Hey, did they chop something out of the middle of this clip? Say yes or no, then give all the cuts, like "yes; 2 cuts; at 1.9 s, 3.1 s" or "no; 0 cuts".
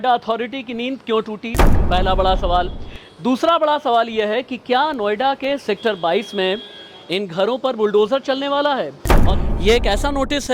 yes; 1 cut; at 9.1 s